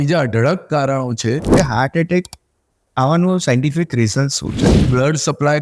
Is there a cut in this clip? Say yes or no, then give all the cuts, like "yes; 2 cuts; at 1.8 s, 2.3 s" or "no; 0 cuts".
yes; 2 cuts; at 1.5 s, 4.6 s